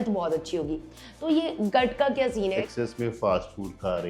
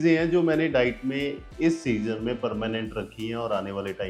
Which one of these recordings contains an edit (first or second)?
first